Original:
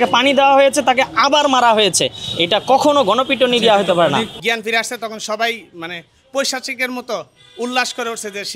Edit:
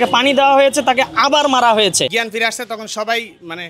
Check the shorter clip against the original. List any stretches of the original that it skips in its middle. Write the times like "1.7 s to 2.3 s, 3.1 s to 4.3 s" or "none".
2.1 s to 4.5 s